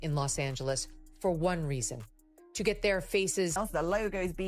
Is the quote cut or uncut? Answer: cut